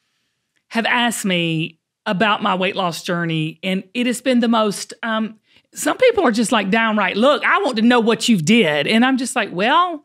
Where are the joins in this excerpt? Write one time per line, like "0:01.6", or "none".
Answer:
none